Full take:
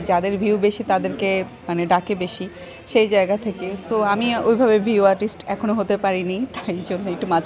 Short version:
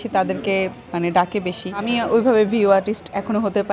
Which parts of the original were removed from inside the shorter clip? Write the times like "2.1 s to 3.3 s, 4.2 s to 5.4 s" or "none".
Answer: 2.6 s to 4.2 s

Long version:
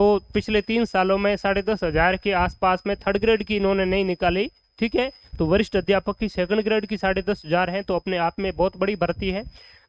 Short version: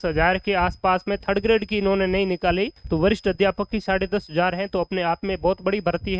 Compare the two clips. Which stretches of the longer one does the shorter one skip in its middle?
4.6 s to 5.3 s, 6.3 s to 7.0 s

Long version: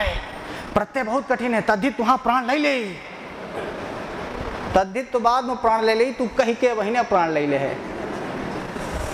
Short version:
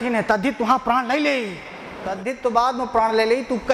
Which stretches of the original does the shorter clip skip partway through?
3.6 s to 4.9 s

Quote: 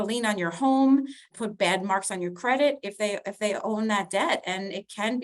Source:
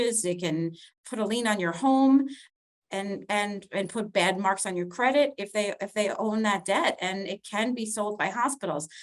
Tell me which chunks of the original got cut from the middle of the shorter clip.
2.6 s to 3.9 s

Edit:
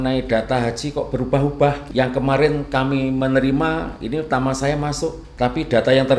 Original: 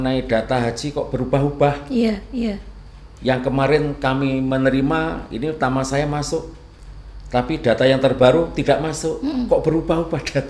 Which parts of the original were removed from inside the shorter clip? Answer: 1.8 s to 3.1 s, 6.5 s to 7.2 s

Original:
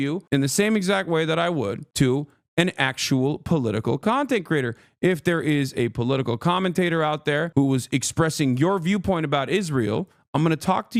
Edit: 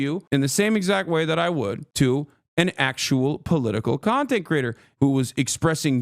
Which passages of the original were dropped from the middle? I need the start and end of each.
4.9 s to 7.5 s

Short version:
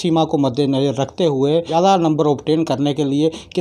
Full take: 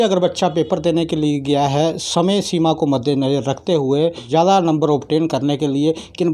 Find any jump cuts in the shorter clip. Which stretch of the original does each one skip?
4.2 s to 4.3 s

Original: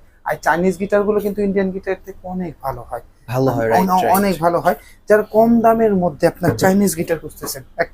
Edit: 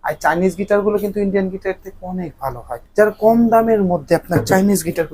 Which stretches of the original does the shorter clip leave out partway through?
3.0 s to 4.9 s

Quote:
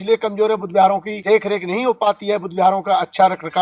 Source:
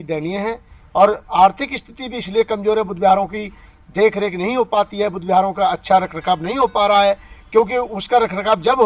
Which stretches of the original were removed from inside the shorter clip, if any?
3.4 s to 3.8 s

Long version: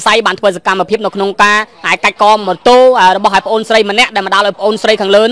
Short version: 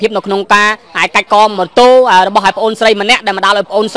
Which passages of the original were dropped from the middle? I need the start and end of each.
none

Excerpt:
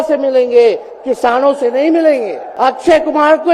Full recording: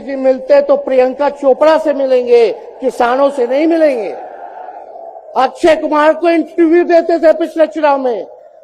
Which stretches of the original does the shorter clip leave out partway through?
4.2 s to 5.2 s

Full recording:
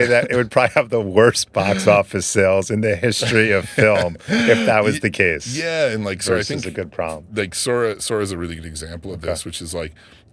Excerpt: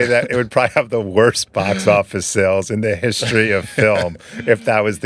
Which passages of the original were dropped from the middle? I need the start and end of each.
none

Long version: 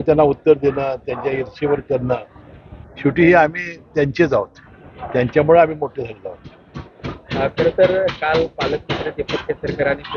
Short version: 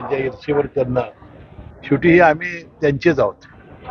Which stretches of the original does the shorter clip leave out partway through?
none

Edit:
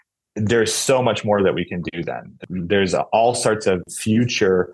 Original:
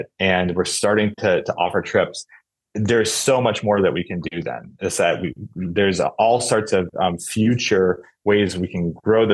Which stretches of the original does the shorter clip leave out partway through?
4.7 s to 5.4 s, 6.9 s to 7.2 s

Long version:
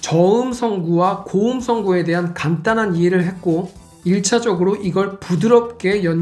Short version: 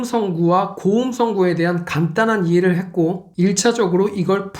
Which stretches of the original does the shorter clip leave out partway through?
3.7 s to 3.9 s

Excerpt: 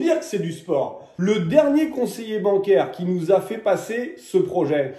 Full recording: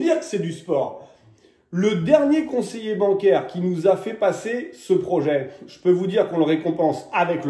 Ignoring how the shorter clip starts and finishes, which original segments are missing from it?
1.0 s to 1.6 s

